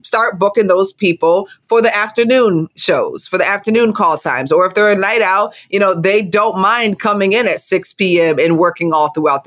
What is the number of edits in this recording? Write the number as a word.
two